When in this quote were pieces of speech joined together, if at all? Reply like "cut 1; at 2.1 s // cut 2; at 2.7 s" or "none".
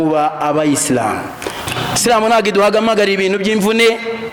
cut 1; at 1.7 s